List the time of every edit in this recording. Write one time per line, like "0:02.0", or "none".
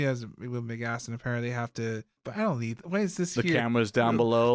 0:02.2